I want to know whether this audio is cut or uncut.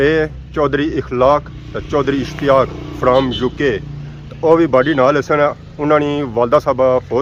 uncut